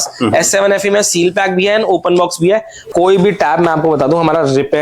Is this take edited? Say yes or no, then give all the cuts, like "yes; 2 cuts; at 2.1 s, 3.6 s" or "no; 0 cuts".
yes; 1 cut; at 2.9 s